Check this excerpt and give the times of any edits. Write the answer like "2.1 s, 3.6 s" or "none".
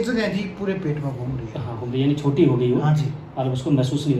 none